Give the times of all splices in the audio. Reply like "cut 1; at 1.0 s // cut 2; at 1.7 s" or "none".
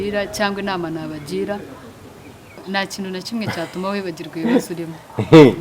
cut 1; at 2.6 s